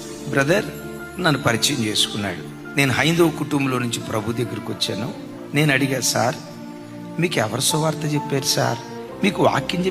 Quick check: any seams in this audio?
no; 0 cuts

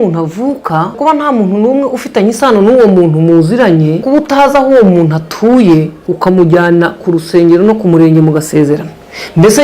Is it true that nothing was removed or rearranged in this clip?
no; 3 cuts; at 0.9 s, 4.0 s, 6.0 s

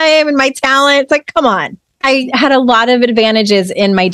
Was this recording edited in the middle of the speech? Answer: yes; 1 cut; at 2.1 s

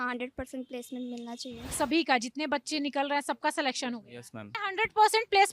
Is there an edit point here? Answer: yes; 2 cuts; at 1.8 s, 4.6 s

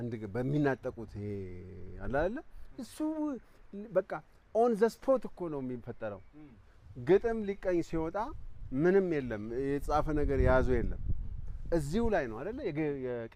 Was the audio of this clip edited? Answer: no; 0 cuts

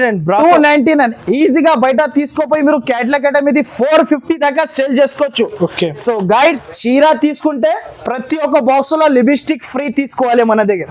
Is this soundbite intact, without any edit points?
no; 1 cut; at 6.6 s

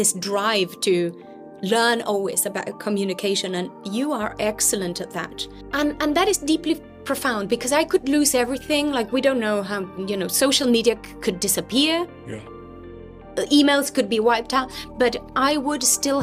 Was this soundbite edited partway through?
yes; 1 cut; at 5.5 s

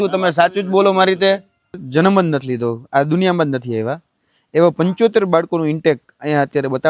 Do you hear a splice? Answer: yes; 1 cut; at 1.8 s

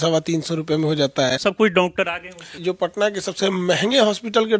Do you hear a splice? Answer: yes; 2 cuts; at 1.4 s, 2.5 s

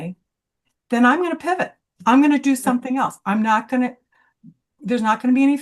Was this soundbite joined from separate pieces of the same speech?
no; 0 cuts

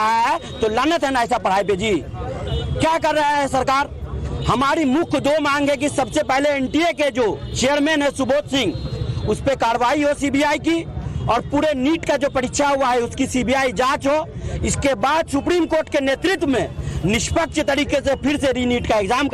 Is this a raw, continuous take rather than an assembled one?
no; 1 cut; at 7.5 s

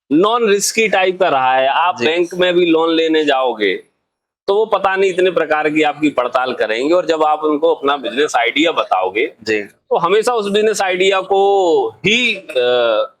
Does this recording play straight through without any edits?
yes; 0 cuts

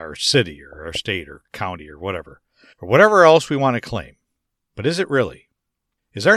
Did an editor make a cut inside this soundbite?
no; 0 cuts

